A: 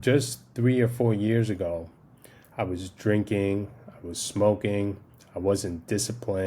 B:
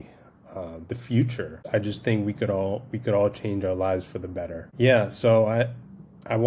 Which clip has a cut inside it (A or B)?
B